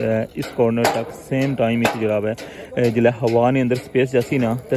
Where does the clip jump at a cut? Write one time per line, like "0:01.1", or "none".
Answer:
none